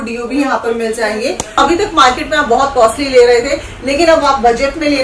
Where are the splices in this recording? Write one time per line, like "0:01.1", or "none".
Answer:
0:01.5